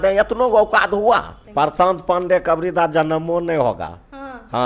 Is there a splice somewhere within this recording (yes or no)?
yes